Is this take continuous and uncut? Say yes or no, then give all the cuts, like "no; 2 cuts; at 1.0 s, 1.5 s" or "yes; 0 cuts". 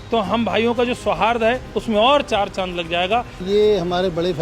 no; 2 cuts; at 1.7 s, 3.4 s